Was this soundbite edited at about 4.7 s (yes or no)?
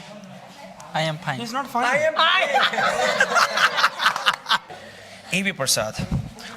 yes